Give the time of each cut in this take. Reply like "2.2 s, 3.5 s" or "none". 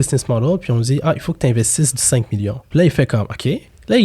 2.6 s